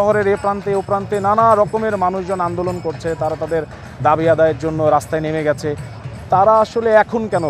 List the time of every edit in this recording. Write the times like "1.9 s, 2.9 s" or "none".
none